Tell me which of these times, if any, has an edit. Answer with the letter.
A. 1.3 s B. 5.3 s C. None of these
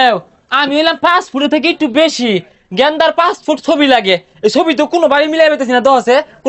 C